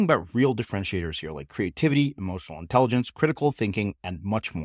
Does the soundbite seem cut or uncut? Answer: uncut